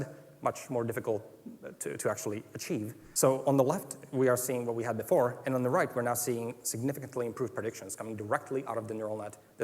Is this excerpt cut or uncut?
cut